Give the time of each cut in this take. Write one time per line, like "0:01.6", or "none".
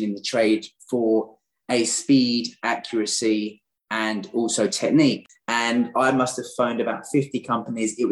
0:05.3